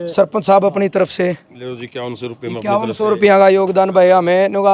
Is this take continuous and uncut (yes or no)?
yes